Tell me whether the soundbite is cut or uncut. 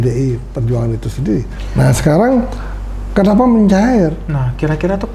cut